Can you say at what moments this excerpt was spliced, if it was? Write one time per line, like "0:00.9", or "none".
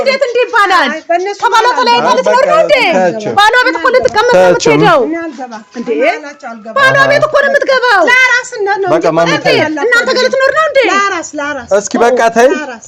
none